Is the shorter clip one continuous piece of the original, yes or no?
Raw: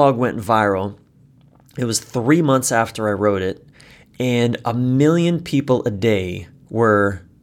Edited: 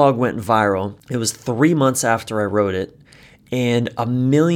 no